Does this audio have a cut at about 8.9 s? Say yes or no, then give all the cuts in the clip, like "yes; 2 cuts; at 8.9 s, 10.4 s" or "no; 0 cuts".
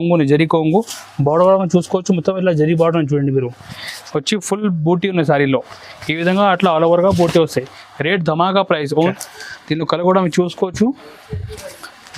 yes; 1 cut; at 8.9 s